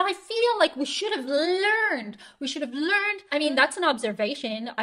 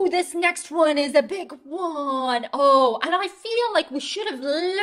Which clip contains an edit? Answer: first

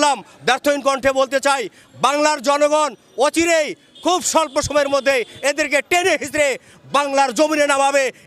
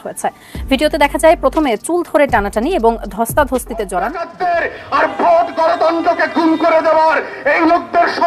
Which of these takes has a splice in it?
second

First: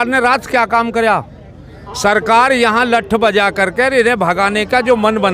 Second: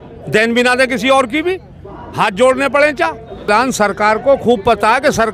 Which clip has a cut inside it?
second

